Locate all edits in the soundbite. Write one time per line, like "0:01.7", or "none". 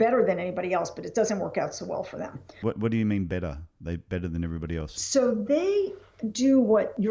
0:02.8
0:04.4